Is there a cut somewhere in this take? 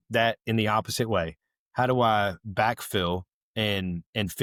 no; 0 cuts

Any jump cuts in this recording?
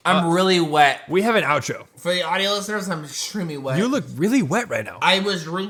no; 0 cuts

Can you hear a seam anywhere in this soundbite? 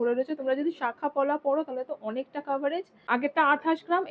yes; 1 cut; at 3.0 s

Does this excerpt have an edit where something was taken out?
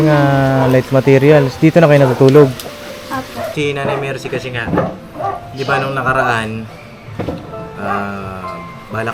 yes; 1 cut; at 3.5 s

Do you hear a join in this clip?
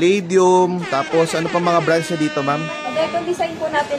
yes; 1 cut; at 2.8 s

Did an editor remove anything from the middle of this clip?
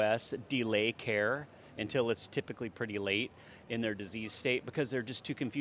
no; 0 cuts

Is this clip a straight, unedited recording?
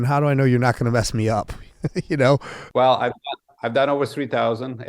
no; 1 cut; at 2.6 s

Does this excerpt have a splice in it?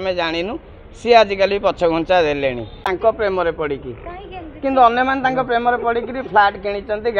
yes; 1 cut; at 2.7 s

